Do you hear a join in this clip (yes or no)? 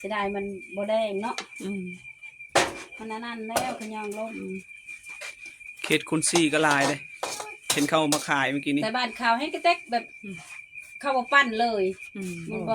no